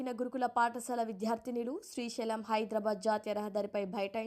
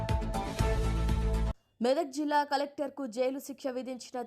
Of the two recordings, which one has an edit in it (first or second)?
second